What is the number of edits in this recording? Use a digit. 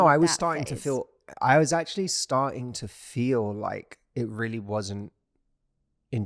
0